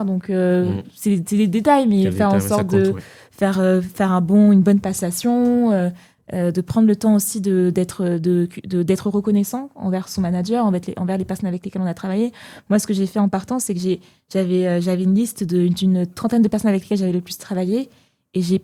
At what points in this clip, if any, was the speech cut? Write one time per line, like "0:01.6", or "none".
none